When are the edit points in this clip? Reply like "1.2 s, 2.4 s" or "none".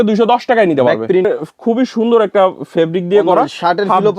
1.3 s